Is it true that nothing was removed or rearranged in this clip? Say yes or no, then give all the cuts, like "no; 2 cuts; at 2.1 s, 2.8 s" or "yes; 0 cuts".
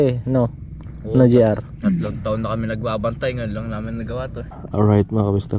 no; 1 cut; at 4.3 s